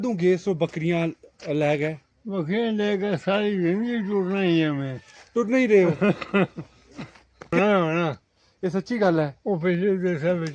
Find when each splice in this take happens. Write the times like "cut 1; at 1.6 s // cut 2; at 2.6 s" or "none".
cut 1; at 7.5 s